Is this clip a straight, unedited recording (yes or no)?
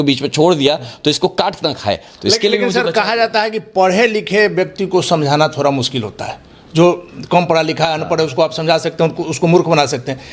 yes